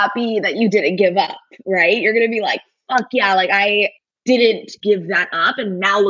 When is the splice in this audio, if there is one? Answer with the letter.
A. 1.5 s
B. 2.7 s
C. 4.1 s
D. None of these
C